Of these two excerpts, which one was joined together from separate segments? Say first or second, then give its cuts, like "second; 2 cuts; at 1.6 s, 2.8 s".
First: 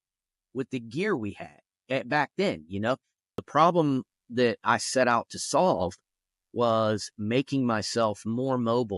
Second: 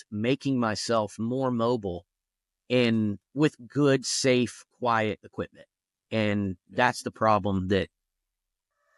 first; 1 cut; at 3.4 s